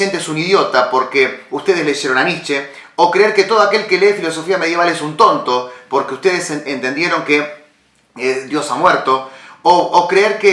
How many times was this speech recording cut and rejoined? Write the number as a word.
zero